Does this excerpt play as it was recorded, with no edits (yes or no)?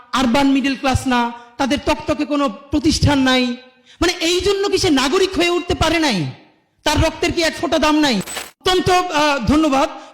no